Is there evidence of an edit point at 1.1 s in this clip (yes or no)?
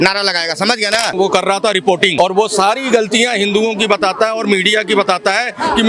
yes